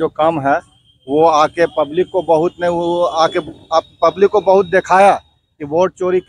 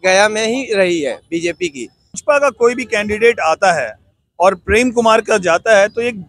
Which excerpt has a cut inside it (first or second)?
second